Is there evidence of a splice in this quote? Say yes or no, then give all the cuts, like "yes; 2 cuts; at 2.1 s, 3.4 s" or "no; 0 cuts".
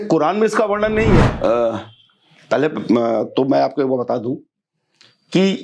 yes; 1 cut; at 1.3 s